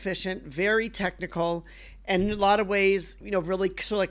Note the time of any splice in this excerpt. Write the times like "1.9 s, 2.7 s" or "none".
3.2 s